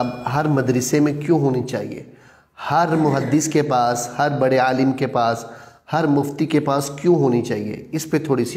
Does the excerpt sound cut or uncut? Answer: uncut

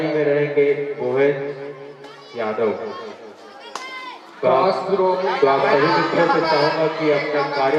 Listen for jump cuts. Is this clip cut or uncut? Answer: uncut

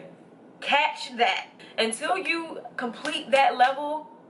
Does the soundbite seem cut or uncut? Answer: cut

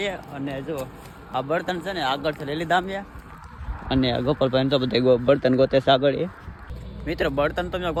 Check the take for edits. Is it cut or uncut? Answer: uncut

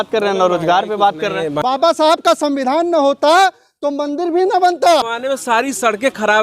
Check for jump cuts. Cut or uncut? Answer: cut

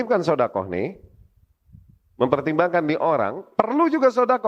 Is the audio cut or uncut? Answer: uncut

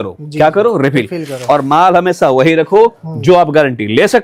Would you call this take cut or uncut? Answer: uncut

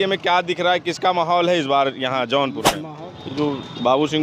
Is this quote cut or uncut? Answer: cut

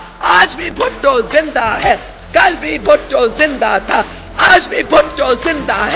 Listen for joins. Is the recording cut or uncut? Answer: uncut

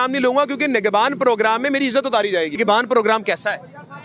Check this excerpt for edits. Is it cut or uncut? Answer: cut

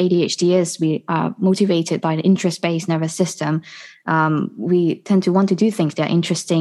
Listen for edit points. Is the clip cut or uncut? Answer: uncut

